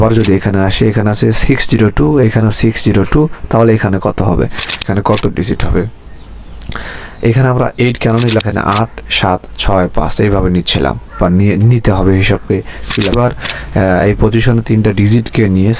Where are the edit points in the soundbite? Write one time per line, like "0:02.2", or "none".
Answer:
0:04.8
0:08.4
0:13.1